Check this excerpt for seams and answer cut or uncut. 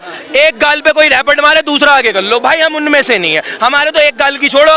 uncut